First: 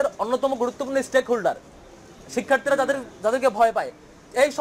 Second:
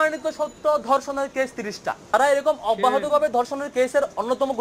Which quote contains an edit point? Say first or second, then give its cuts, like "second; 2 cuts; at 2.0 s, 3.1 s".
second; 1 cut; at 2.1 s